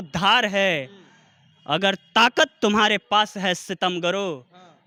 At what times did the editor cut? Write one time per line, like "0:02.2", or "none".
none